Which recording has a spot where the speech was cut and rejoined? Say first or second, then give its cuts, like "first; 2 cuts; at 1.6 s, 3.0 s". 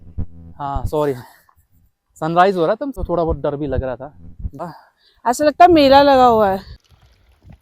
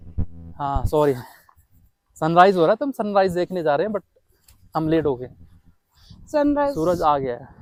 first; 3 cuts; at 3.0 s, 4.7 s, 6.7 s